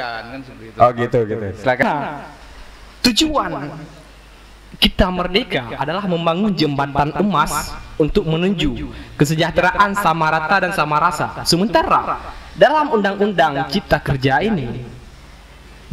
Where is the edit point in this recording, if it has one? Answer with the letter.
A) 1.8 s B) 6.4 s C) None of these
A